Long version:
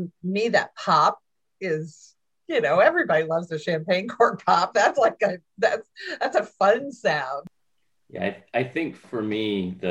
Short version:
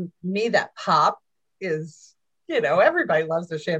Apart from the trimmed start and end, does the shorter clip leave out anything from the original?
no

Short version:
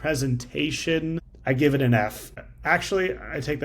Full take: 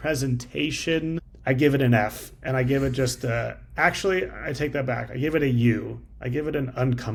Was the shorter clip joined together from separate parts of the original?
yes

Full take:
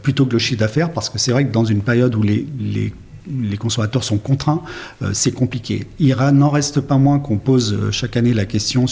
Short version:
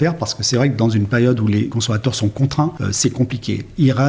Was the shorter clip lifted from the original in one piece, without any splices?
no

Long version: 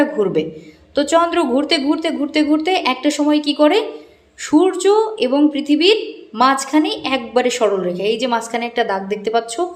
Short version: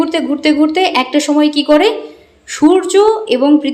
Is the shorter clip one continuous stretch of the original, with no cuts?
yes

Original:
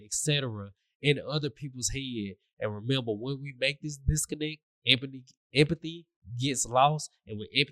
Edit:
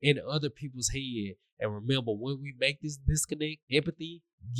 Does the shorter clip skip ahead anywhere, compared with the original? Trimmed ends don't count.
yes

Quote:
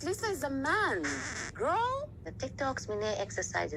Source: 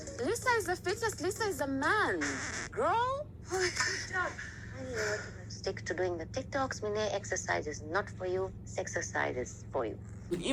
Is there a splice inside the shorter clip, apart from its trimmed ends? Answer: yes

